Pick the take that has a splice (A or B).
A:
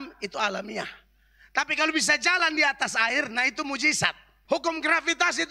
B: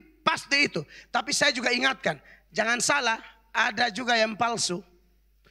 A